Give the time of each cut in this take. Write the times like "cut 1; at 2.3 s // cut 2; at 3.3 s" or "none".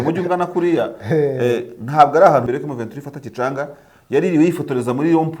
cut 1; at 2.4 s